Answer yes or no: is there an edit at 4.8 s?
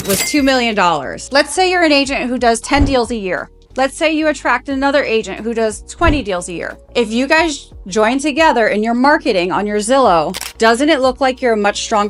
no